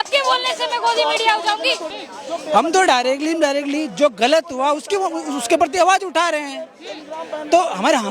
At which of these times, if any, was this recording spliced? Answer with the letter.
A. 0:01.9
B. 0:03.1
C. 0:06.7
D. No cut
A